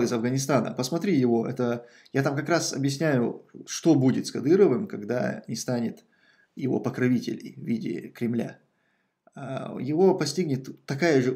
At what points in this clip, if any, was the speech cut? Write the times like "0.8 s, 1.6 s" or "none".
none

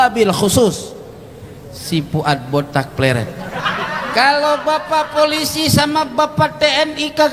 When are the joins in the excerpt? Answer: 3.6 s

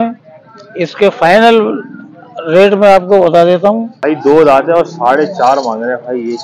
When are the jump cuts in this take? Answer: 3.9 s

